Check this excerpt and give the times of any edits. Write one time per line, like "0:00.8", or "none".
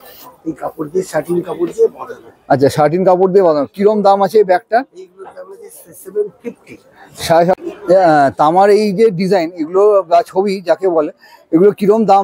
0:07.5